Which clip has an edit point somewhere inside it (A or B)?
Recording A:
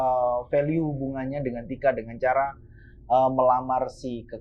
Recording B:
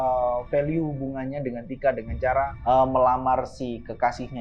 B